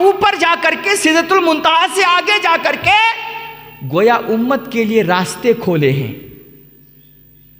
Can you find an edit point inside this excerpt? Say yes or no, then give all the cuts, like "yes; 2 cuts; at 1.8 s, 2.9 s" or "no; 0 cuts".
no; 0 cuts